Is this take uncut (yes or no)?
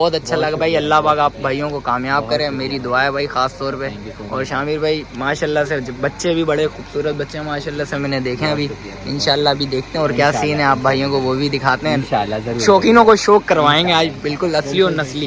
yes